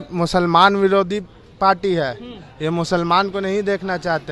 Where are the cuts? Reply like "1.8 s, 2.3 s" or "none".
none